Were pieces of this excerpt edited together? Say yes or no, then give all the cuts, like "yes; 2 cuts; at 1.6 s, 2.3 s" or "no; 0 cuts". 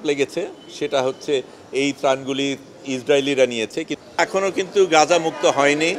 yes; 1 cut; at 3.9 s